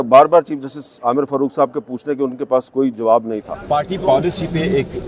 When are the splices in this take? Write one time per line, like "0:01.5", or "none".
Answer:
0:03.5